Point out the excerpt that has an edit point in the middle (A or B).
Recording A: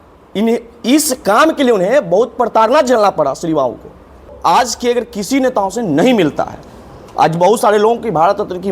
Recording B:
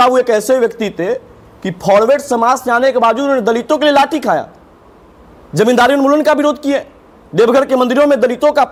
A